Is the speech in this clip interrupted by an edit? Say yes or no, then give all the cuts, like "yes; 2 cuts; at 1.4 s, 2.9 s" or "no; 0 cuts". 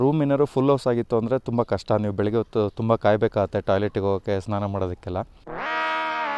no; 0 cuts